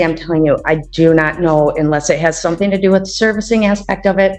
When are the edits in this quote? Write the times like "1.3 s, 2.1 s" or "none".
none

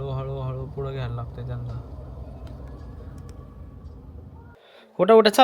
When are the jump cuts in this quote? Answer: 4.5 s

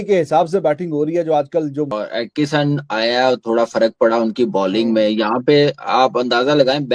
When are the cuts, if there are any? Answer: 1.9 s

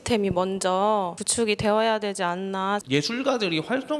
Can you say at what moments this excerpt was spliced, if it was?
1.2 s, 2.8 s

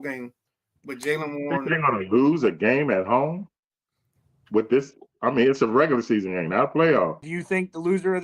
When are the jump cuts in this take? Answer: 7.3 s

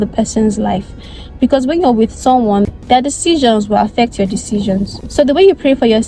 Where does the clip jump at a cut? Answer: 2.7 s, 5.0 s

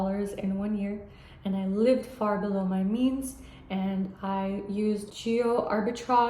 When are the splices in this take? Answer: 5.1 s

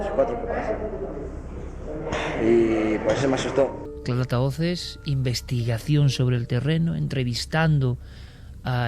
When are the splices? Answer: none

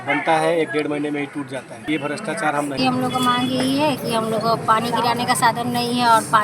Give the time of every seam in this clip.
1.7 s, 3.1 s

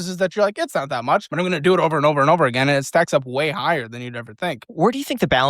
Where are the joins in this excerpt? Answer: 1.3 s

